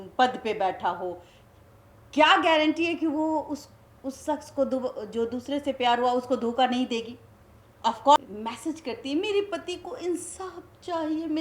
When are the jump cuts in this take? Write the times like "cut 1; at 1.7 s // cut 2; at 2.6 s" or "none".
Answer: cut 1; at 8.2 s